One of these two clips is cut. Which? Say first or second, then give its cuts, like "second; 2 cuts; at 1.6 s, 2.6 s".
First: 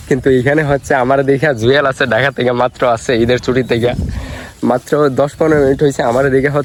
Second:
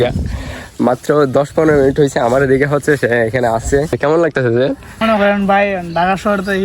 second; 2 cuts; at 3.9 s, 5.0 s